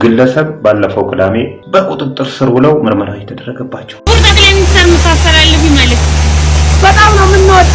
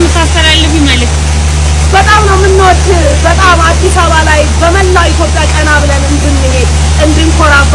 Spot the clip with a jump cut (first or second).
first